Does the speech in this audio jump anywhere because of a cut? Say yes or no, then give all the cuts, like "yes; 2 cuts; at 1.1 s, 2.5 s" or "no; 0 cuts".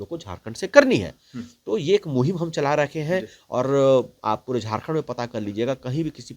no; 0 cuts